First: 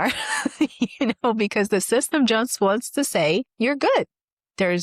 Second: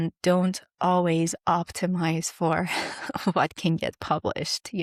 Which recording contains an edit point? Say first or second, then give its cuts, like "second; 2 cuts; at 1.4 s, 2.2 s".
first; 1 cut; at 3.5 s